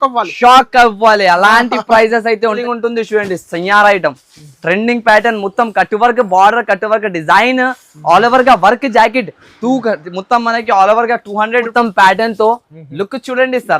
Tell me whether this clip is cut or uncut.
cut